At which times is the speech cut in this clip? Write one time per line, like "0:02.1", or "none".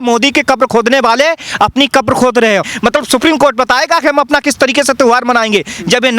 0:02.7